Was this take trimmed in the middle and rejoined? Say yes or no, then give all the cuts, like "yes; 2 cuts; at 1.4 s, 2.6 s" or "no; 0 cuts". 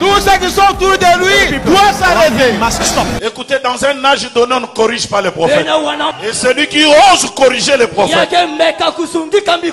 yes; 2 cuts; at 3.2 s, 6.1 s